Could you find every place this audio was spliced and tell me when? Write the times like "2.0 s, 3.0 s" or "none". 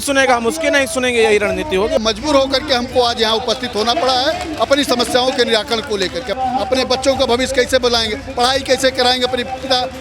2.0 s, 6.3 s